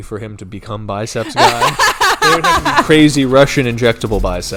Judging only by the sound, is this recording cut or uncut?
uncut